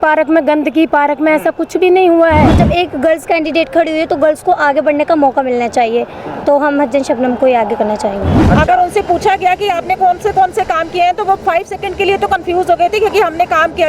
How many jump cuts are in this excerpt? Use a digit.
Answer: 2